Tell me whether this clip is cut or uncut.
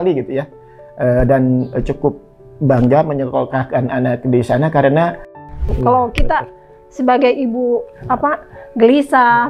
cut